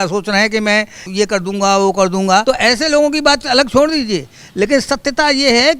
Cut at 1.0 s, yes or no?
yes